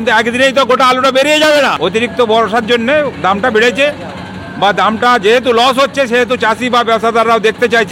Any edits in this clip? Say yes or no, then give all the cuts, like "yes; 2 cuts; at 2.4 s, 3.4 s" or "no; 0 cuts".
yes; 1 cut; at 1.7 s